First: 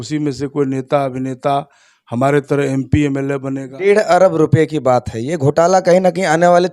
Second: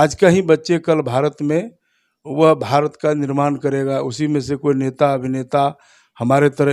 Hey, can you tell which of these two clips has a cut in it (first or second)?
first